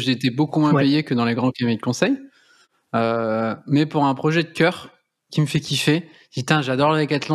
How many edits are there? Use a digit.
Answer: 0